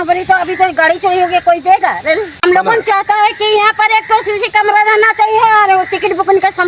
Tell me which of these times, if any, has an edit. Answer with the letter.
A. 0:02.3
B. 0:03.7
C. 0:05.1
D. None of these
A